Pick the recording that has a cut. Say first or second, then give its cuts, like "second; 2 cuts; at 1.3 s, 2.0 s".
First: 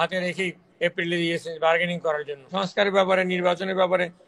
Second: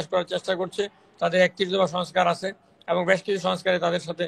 first; 1 cut; at 2.5 s